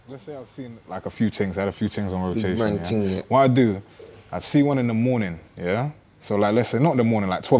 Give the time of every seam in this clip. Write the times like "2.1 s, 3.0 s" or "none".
none